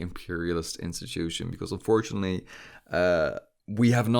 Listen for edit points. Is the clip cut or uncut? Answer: uncut